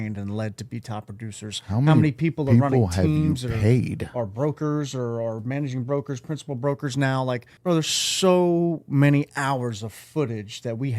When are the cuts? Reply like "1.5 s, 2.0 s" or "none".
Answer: 7.5 s